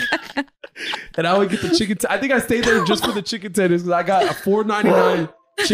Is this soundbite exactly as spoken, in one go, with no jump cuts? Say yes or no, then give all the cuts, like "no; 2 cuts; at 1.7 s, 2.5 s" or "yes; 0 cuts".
yes; 0 cuts